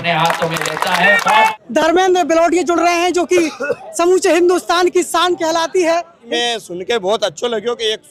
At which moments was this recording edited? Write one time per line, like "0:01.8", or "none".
0:01.5
0:06.2